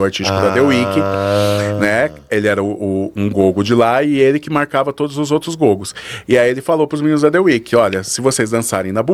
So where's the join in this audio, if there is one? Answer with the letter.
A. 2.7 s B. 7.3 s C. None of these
C